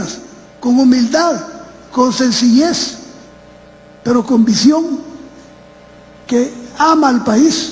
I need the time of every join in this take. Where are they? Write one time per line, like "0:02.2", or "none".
none